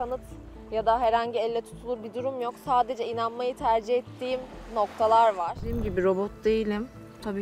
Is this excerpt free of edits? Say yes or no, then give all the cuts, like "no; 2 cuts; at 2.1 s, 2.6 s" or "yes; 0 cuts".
no; 1 cut; at 5.8 s